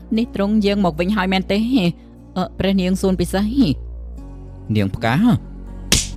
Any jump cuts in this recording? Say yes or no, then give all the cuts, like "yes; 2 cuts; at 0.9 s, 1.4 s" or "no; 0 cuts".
no; 0 cuts